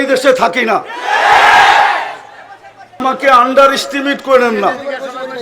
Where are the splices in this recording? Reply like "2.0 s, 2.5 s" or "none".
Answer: 3.0 s